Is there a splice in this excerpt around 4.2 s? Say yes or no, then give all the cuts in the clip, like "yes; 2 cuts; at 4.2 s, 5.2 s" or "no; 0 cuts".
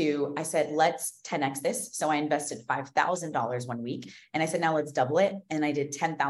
no; 0 cuts